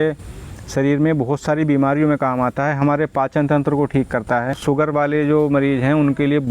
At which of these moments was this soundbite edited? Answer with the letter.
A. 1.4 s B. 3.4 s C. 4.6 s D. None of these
C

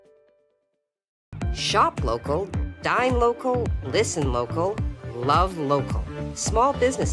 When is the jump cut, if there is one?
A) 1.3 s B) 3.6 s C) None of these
A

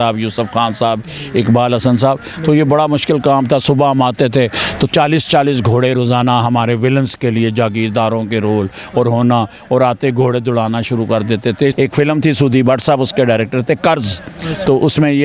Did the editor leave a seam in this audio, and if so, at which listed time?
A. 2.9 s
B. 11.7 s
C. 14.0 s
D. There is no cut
B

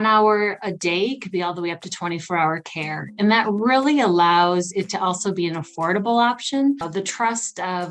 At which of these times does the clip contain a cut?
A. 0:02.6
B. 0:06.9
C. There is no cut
B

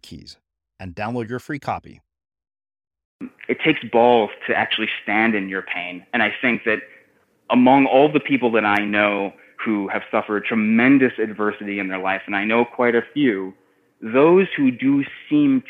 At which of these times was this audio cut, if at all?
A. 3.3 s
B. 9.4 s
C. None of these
A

